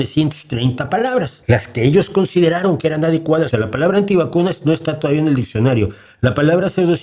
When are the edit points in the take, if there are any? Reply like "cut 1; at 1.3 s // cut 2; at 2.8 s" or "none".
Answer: cut 1; at 1.3 s // cut 2; at 3.5 s